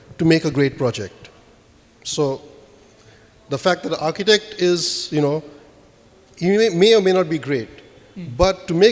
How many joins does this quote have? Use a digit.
0